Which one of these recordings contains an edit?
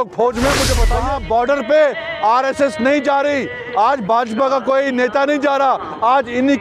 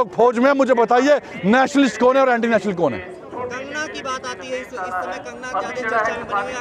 first; 1 cut; at 0.9 s

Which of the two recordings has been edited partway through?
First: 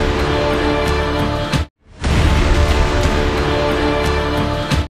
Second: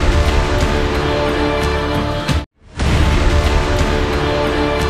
first; 1 cut; at 1.5 s

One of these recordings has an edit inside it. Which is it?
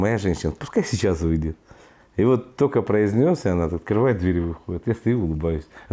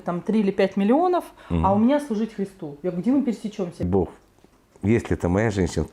second; 1 cut; at 3.9 s

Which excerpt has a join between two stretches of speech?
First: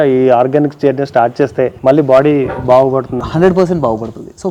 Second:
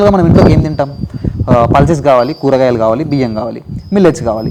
first; 1 cut; at 1.8 s

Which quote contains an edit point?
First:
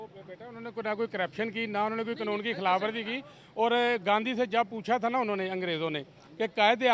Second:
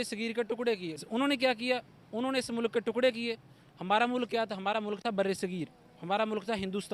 second; 1 cut; at 1.0 s

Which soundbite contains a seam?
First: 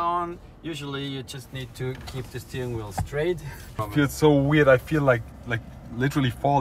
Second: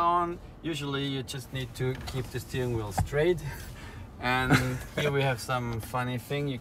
first; 1 cut; at 3.8 s

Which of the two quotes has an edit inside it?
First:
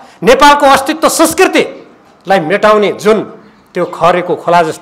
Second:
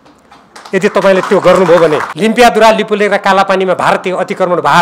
second; 1 cut; at 2.1 s

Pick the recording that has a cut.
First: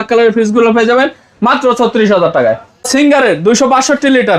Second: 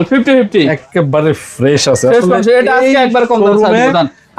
first; 1 cut; at 2.9 s

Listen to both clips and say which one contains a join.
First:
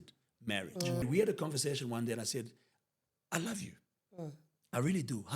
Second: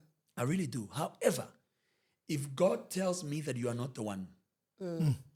first; 1 cut; at 1.0 s

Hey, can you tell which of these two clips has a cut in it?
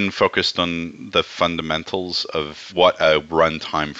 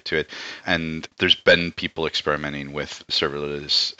second; 2 cuts; at 1.1 s, 3.1 s

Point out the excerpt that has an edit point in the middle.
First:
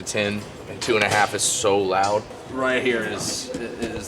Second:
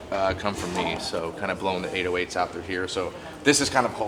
first; 1 cut; at 2.4 s

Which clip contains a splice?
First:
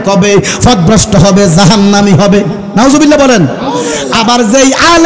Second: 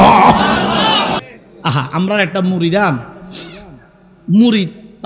second; 1 cut; at 1.2 s

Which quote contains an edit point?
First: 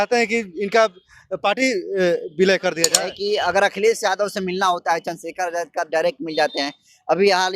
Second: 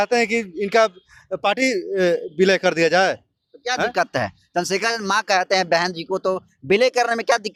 first; 1 cut; at 2.8 s

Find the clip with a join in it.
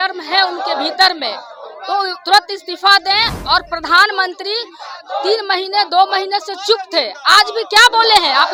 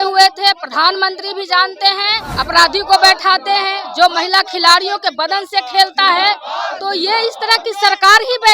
second; 1 cut; at 2.2 s

